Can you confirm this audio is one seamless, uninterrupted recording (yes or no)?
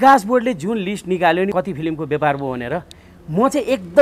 no